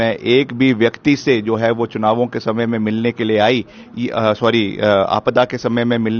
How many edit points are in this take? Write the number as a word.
zero